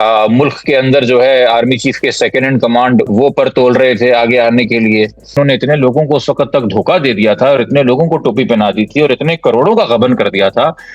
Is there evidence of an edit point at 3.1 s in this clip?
yes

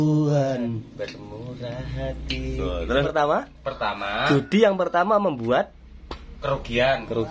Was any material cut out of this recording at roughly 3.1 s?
yes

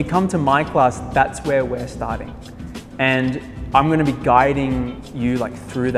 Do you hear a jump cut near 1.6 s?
no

